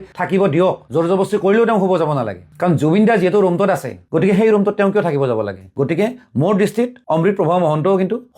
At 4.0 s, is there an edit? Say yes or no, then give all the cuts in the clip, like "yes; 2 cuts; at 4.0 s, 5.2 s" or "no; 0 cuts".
yes; 1 cut; at 4.0 s